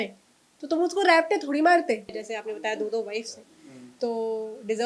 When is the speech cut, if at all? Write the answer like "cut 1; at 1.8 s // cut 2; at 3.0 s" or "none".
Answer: cut 1; at 2.2 s

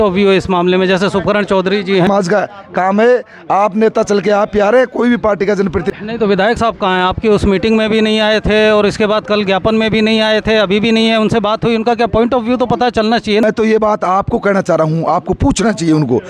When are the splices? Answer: cut 1; at 2.1 s // cut 2; at 5.9 s // cut 3; at 13.4 s

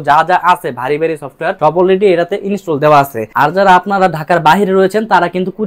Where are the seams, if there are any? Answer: cut 1; at 1.5 s // cut 2; at 3.2 s

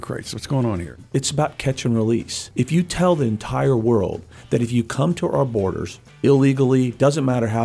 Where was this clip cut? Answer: cut 1; at 1.0 s // cut 2; at 2.4 s

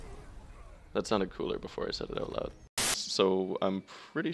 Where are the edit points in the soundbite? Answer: cut 1; at 3.0 s

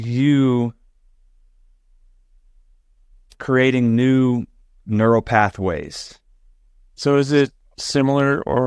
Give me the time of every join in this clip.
none

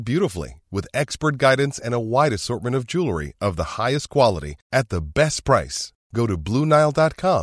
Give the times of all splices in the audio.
none

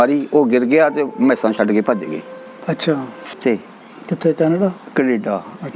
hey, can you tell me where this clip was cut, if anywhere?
cut 1; at 3.4 s

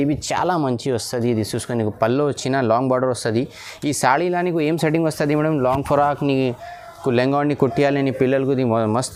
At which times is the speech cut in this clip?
none

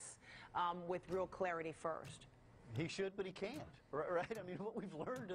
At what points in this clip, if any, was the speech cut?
none

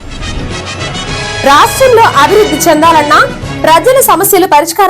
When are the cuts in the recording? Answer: cut 1; at 1.4 s

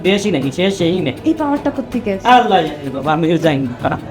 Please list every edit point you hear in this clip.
none

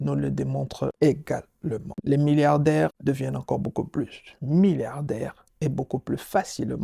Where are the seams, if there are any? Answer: cut 1; at 0.9 s // cut 2; at 1.9 s // cut 3; at 3.0 s

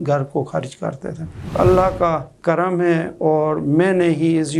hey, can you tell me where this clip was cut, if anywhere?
cut 1; at 1.5 s

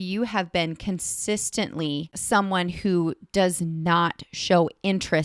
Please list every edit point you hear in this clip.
cut 1; at 2.1 s

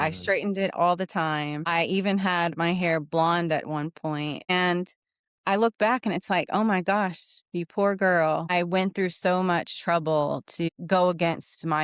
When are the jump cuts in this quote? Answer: none

